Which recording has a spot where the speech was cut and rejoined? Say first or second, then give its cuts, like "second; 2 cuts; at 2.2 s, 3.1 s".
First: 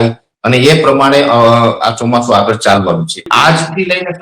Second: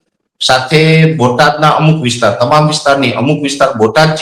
first; 1 cut; at 3.2 s